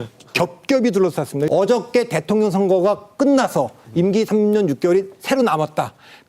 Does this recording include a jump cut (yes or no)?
yes